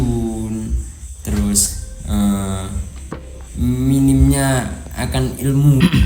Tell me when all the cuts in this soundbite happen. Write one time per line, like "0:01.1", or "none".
none